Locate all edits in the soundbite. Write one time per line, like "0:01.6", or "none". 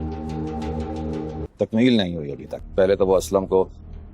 0:01.5